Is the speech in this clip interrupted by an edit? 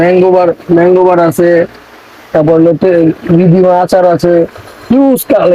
no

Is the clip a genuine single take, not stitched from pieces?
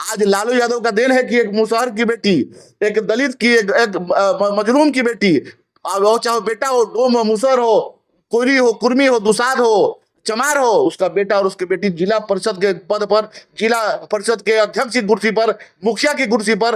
yes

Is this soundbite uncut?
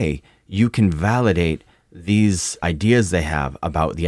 no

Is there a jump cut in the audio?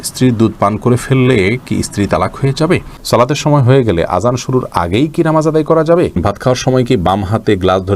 yes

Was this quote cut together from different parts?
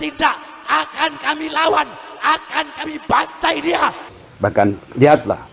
yes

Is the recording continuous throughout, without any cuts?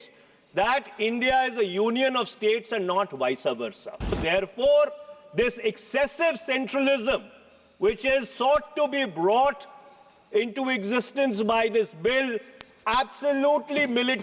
no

